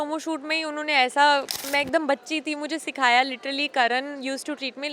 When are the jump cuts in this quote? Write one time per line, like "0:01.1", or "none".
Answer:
0:01.6